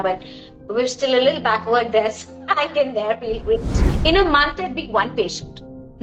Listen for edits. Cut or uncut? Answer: cut